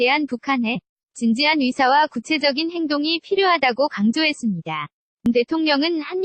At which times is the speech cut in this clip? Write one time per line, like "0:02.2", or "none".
0:05.3